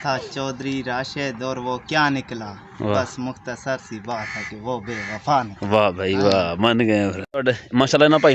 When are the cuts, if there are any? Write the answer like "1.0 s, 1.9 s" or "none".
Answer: none